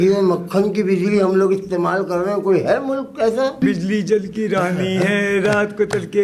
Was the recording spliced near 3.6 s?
yes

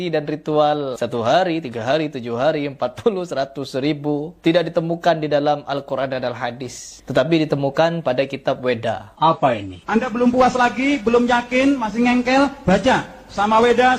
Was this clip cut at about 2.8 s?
no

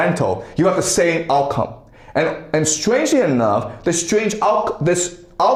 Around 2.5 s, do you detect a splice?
no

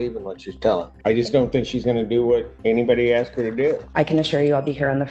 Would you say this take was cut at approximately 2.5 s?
yes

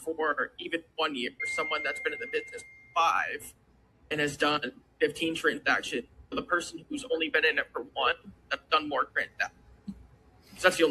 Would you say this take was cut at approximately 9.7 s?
no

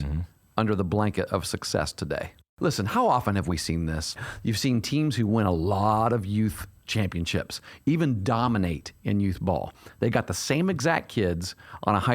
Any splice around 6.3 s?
no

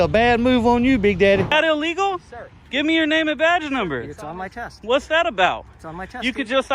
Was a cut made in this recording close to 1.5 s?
yes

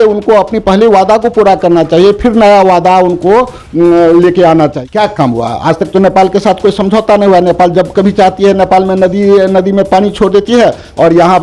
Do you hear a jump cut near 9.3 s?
no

